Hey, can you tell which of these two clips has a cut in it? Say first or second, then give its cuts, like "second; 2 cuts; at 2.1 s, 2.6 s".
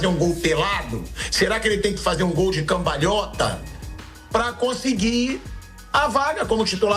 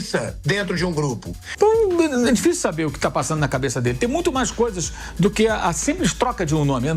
second; 1 cut; at 1.4 s